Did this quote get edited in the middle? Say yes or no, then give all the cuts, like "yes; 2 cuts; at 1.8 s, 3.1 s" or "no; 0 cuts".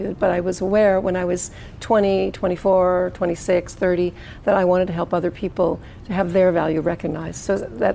no; 0 cuts